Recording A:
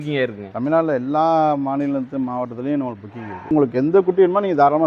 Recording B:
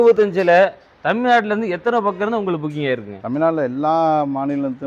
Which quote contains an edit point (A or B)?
A